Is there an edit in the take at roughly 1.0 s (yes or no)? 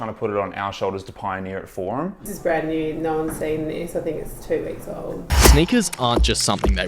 no